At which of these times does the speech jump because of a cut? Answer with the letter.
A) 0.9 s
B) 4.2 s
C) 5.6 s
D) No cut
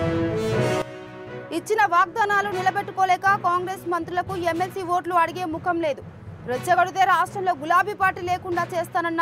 D